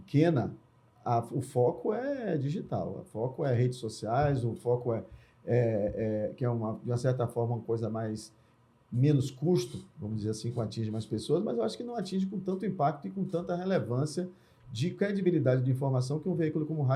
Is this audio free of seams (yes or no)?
yes